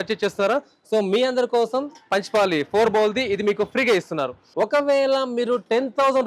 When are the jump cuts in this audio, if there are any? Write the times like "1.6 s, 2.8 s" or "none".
4.4 s